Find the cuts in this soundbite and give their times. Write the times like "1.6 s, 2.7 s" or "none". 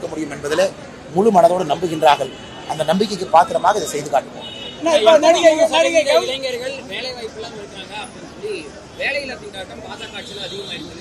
none